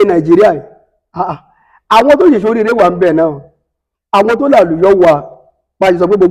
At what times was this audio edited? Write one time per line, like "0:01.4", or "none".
none

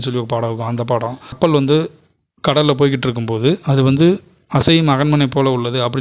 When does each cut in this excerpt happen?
0:01.4

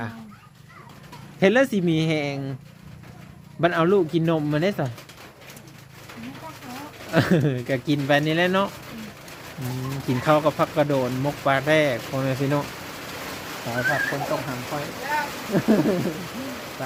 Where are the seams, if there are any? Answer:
none

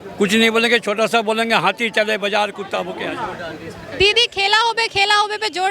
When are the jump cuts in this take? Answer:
0:02.9

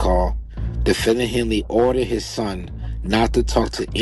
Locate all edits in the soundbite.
none

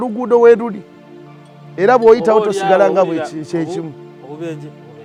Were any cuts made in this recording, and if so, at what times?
none

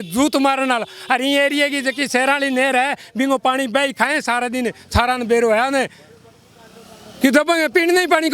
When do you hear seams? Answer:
none

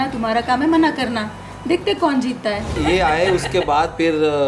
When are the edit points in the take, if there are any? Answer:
0:02.7

